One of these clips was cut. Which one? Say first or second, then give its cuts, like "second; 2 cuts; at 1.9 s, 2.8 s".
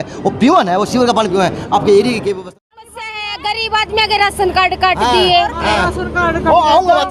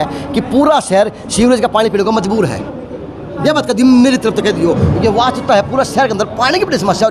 first; 1 cut; at 2.4 s